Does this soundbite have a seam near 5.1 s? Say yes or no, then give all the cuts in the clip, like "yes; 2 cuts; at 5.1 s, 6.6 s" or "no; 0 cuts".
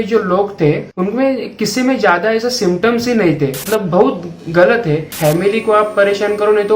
yes; 3 cuts; at 0.9 s, 3.6 s, 5.1 s